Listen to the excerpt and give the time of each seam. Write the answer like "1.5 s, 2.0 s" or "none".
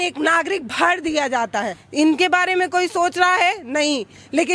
1.8 s